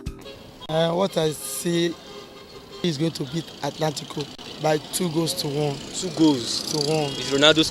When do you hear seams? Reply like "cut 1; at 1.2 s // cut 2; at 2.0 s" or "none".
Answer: cut 1; at 2.8 s

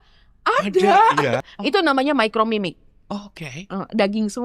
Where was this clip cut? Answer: cut 1; at 1.4 s

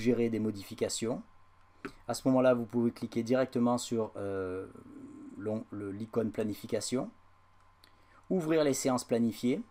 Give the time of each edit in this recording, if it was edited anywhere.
none

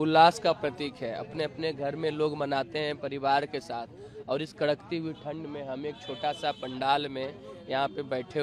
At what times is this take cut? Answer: none

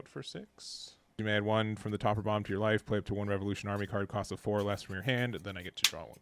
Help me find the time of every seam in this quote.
cut 1; at 1.2 s

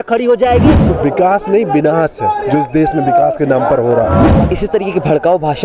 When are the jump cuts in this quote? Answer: cut 1; at 0.8 s // cut 2; at 4.4 s

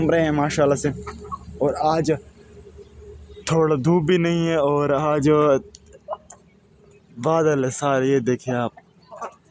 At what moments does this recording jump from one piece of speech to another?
none

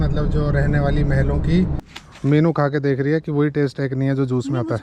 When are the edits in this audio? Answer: cut 1; at 1.8 s

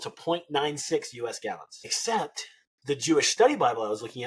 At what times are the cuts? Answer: cut 1; at 2.0 s

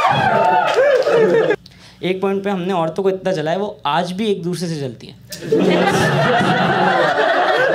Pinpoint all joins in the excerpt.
cut 1; at 1.6 s

